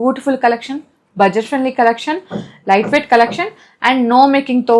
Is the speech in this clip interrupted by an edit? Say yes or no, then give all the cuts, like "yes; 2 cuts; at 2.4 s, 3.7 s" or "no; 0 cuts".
no; 0 cuts